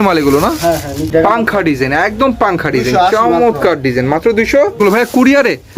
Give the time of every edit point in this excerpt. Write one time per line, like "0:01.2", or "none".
0:01.1
0:04.8